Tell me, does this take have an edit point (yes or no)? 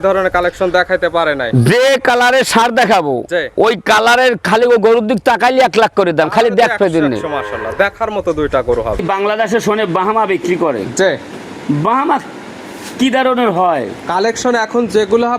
yes